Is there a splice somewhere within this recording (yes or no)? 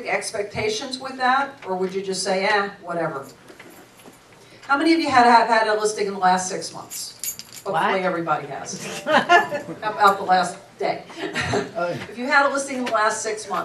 yes